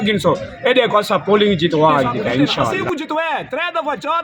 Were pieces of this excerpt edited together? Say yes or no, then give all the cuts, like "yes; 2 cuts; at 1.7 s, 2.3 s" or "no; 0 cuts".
yes; 1 cut; at 2.8 s